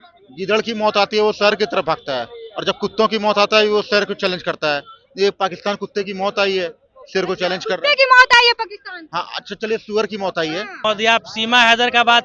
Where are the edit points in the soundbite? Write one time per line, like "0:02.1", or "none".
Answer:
0:10.8